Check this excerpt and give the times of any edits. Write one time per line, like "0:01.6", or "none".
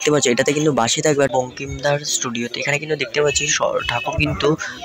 0:01.3